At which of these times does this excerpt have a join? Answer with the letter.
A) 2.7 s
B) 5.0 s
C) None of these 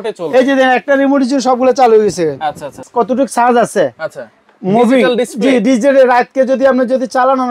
A